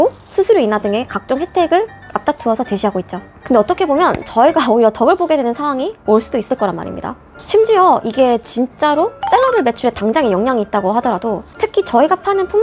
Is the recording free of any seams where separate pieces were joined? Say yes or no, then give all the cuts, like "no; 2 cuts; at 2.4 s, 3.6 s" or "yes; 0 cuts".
yes; 0 cuts